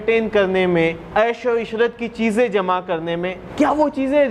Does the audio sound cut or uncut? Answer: cut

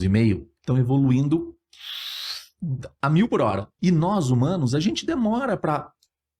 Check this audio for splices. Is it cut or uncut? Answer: cut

